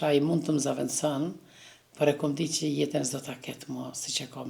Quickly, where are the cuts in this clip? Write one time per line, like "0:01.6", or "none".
none